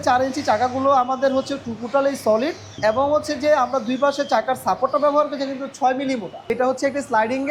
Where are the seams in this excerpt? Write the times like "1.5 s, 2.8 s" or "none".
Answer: 2.7 s, 6.5 s